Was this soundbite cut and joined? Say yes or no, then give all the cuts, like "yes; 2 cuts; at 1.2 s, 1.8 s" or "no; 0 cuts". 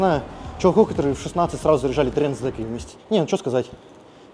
yes; 1 cut; at 2.9 s